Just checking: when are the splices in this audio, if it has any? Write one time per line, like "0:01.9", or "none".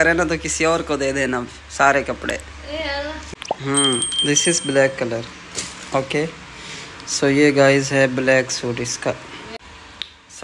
0:03.3
0:09.6